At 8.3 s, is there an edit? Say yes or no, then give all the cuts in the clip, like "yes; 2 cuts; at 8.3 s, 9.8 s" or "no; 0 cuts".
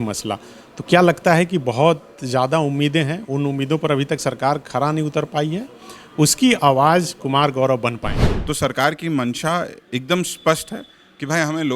yes; 1 cut; at 8.3 s